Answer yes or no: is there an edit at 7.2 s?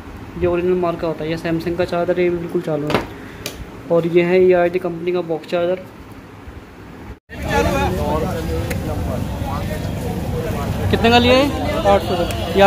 yes